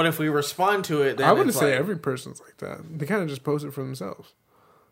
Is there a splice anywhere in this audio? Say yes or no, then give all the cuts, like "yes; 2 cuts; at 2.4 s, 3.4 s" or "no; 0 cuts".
no; 0 cuts